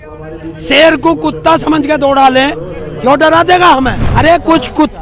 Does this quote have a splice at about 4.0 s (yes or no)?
yes